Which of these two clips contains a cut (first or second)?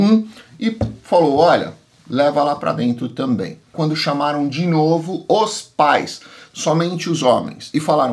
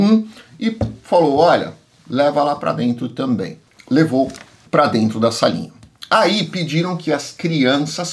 first